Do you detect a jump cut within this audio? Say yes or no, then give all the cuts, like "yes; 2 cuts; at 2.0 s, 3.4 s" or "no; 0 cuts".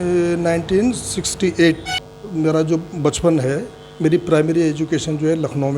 yes; 1 cut; at 1.9 s